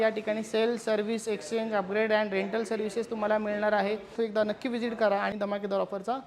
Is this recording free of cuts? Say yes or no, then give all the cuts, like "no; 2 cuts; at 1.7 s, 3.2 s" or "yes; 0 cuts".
no; 2 cuts; at 4.1 s, 5.3 s